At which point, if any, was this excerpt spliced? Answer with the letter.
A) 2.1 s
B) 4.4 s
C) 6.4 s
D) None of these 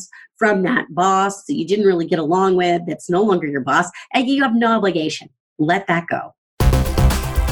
C